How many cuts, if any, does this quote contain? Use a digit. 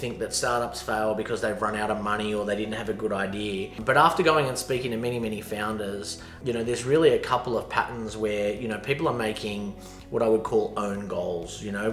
2